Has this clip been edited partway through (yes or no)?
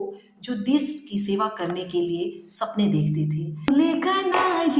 yes